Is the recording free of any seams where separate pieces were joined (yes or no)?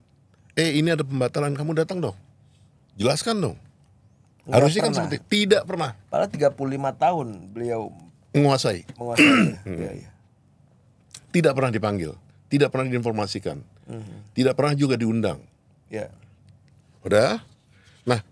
yes